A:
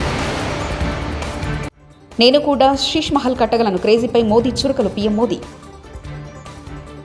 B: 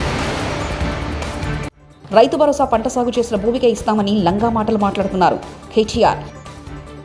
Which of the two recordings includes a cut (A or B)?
B